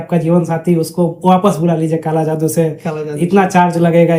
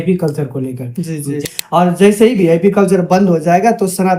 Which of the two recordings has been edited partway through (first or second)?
second